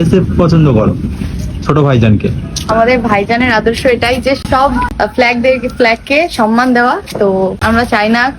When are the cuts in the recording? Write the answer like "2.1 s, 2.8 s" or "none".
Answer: 4.4 s, 7.6 s